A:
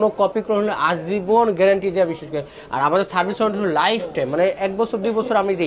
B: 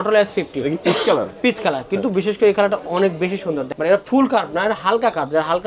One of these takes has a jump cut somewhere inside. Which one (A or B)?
B